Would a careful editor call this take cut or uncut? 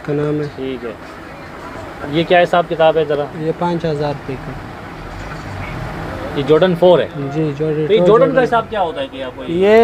uncut